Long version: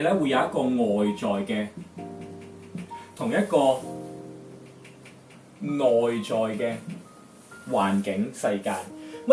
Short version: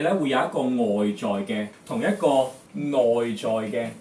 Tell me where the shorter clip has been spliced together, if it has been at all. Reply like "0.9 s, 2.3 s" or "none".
1.8 s, 2.6 s